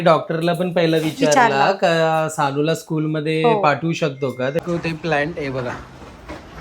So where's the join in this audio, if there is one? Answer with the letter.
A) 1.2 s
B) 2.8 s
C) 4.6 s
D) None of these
C